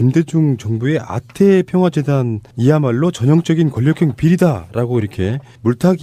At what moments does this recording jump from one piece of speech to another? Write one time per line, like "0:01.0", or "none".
none